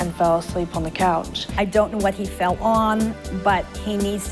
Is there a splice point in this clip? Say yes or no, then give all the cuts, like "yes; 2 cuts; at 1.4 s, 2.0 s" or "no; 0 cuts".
yes; 1 cut; at 1.4 s